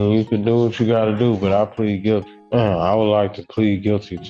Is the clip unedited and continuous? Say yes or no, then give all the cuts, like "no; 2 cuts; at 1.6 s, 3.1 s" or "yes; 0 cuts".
no; 1 cut; at 2.4 s